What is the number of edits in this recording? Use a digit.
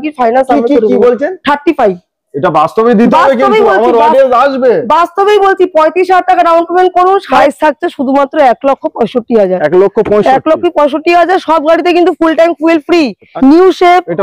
2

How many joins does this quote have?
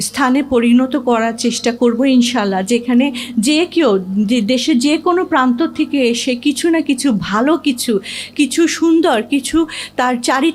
0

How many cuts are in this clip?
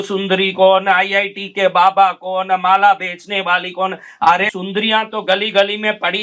1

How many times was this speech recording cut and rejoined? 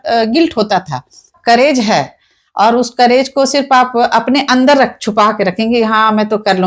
1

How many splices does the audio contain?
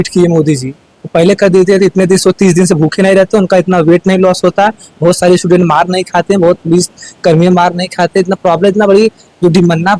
0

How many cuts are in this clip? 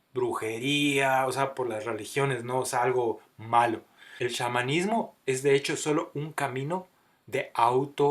1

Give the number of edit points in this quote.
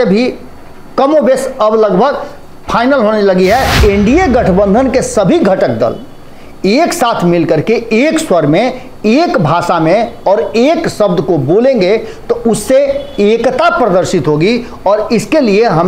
1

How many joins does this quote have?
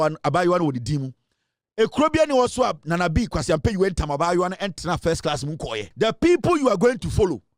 1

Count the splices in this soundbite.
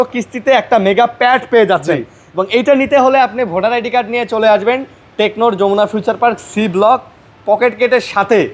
0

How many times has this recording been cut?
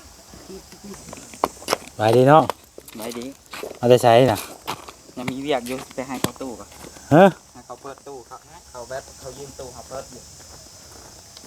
1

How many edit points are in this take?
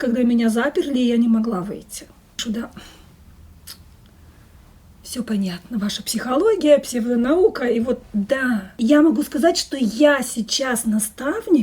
2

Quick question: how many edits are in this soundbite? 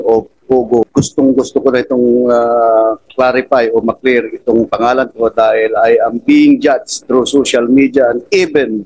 2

